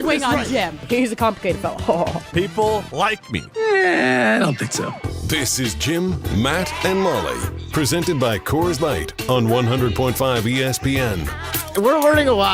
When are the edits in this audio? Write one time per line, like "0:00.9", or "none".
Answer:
0:11.5